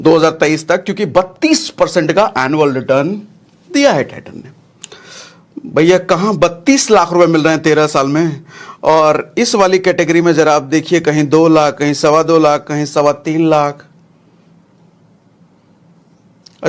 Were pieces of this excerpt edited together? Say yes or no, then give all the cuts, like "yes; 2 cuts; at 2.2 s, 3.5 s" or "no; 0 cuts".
no; 0 cuts